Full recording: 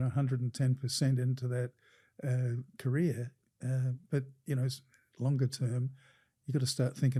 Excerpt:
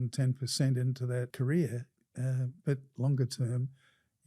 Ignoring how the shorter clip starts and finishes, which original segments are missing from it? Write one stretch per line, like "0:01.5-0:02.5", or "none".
0:01.7-0:02.8
0:04.3-0:05.1